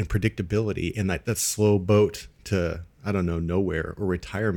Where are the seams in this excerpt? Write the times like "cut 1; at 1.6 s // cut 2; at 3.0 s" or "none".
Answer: cut 1; at 1.2 s